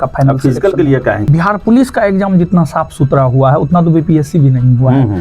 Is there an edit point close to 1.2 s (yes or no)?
yes